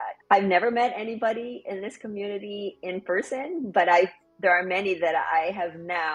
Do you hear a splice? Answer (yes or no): no